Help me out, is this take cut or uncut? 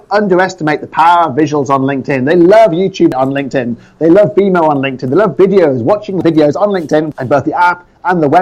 cut